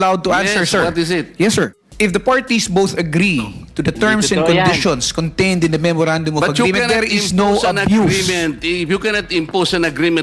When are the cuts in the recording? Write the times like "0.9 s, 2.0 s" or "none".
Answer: 1.8 s

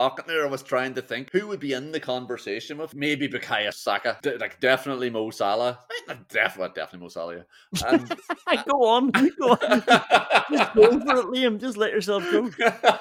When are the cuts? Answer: 1.2 s, 2.9 s, 3.8 s

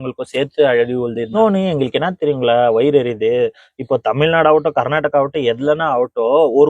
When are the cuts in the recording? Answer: 1.4 s

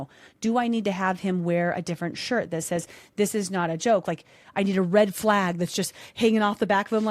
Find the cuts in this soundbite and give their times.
4.0 s

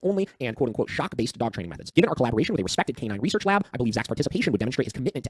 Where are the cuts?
1.8 s

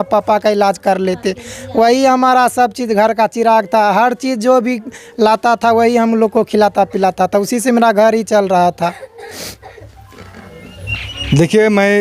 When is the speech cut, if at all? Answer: none

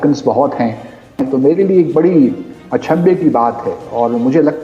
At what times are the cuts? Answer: 1.2 s

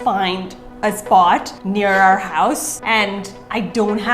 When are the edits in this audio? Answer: 1.6 s, 2.7 s

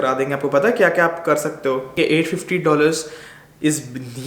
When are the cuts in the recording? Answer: 1.9 s

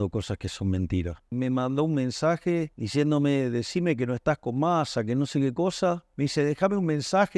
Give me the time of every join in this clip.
1.3 s, 2.8 s, 6.1 s

